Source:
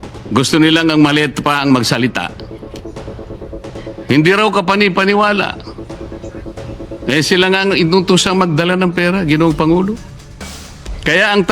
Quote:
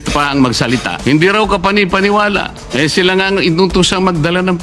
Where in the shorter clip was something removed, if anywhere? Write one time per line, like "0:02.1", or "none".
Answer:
0:00.9
0:02.6

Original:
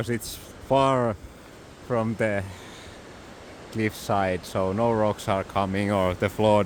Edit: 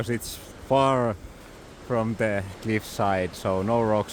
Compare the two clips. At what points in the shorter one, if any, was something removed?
0:02.5

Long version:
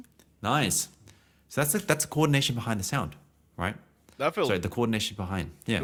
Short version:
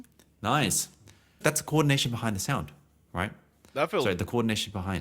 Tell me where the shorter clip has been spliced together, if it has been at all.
0:01.4

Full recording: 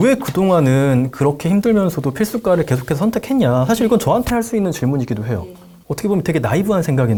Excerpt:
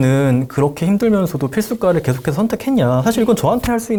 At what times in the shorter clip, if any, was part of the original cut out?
none

